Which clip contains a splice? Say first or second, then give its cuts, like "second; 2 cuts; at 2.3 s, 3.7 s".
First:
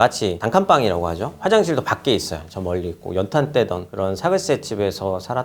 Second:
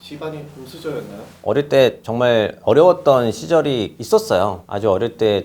second; 1 cut; at 1.4 s